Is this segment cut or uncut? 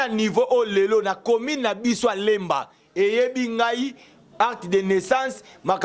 uncut